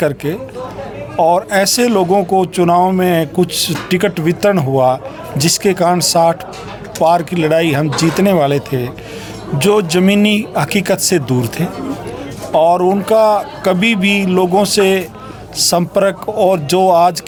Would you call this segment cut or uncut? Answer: uncut